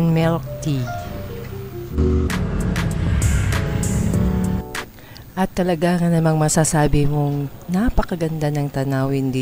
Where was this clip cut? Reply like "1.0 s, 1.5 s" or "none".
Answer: 2.3 s